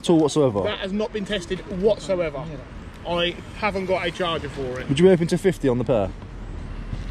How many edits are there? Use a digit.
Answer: 0